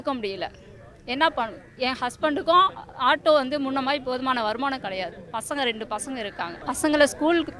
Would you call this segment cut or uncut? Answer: cut